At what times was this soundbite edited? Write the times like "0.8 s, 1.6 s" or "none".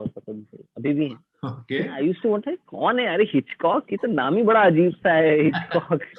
1.9 s